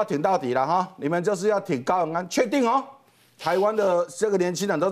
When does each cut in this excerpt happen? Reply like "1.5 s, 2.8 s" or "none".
none